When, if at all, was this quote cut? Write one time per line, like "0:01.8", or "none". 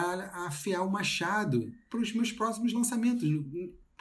0:01.8